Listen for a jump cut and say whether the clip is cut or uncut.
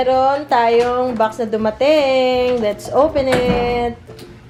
uncut